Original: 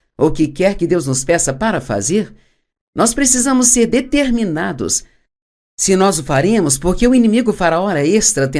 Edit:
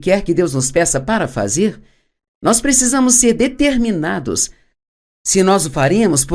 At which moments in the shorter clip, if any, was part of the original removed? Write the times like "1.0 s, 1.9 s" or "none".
none